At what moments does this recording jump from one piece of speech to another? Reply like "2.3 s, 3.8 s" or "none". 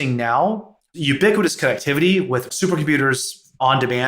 2.5 s